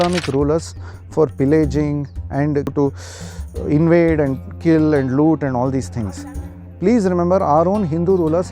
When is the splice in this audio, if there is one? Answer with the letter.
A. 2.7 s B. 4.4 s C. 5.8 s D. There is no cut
A